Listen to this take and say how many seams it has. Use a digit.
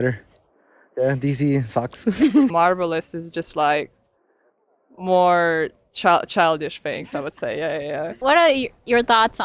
2